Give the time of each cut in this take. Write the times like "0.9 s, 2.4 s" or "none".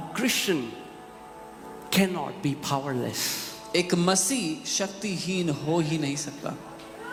none